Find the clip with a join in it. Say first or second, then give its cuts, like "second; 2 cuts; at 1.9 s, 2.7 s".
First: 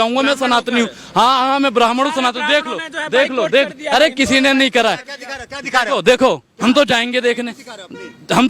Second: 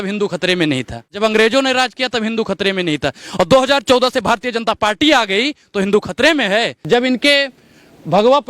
second; 2 cuts; at 1.1 s, 6.9 s